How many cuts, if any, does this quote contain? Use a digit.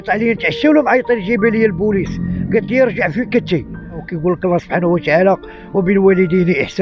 1